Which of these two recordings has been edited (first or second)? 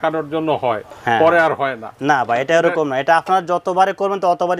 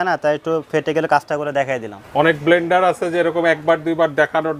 second